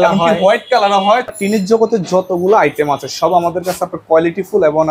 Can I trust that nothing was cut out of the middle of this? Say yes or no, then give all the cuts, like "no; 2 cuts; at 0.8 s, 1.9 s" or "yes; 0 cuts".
no; 1 cut; at 1.1 s